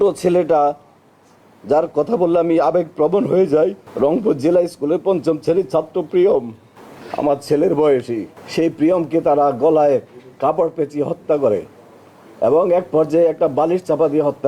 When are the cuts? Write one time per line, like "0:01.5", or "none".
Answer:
none